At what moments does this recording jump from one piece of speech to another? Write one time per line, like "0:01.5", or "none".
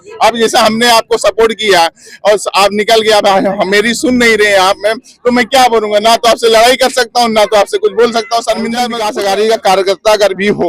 0:09.0

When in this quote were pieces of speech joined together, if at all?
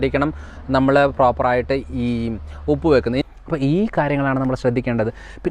0:03.2

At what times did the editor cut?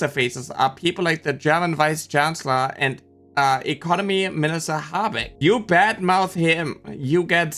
none

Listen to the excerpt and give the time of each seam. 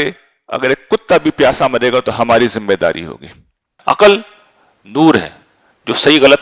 0:03.6

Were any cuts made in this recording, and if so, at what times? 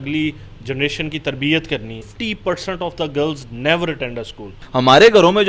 0:02.1
0:04.6

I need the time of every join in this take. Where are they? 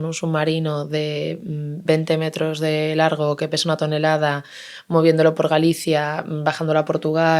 none

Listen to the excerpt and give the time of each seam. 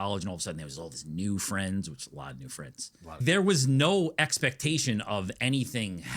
0:03.2

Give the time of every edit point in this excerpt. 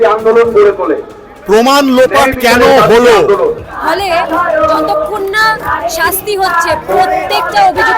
0:03.7

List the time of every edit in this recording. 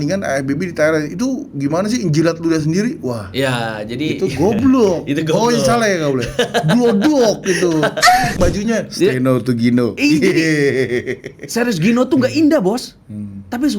0:08.3

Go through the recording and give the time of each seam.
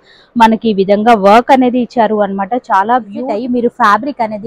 0:03.2

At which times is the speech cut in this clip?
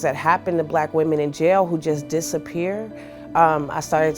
none

